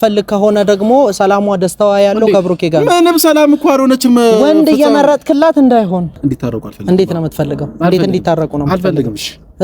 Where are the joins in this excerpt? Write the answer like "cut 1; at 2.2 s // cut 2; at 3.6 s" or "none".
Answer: cut 1; at 6.2 s

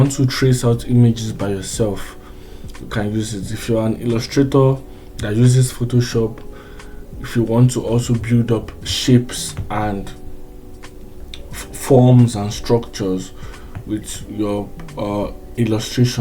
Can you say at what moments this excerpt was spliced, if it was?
none

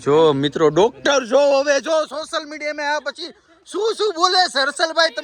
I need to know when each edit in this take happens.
none

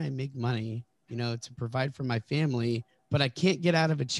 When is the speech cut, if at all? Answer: cut 1; at 2.9 s

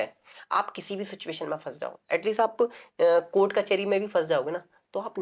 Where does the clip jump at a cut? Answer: none

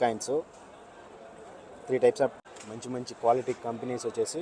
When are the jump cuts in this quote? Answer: cut 1; at 2.4 s

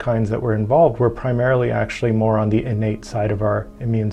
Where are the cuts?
none

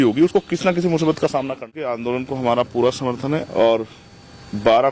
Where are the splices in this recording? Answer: cut 1; at 2.0 s

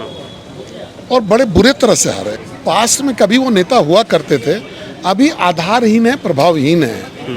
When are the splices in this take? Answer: cut 1; at 2.4 s

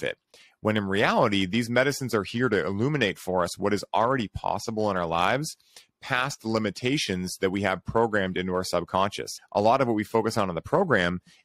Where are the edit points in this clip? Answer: cut 1; at 9.4 s

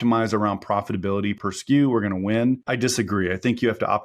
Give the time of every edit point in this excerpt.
cut 1; at 1.4 s // cut 2; at 2.7 s

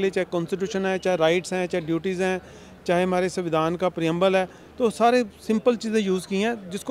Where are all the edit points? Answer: none

